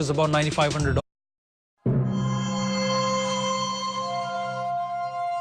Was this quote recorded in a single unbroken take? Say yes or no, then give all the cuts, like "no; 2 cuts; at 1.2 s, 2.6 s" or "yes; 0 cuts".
yes; 0 cuts